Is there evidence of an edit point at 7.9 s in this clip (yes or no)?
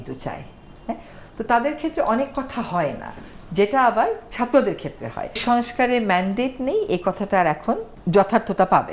yes